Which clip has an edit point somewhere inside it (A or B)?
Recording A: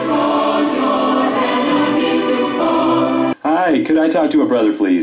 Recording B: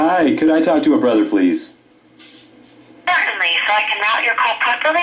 B